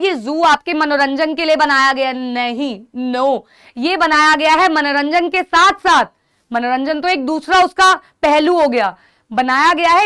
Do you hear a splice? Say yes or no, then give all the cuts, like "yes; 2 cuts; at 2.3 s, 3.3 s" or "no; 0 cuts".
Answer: no; 0 cuts